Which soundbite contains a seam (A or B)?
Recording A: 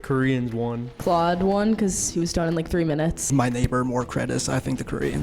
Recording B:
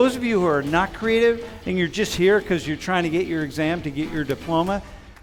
A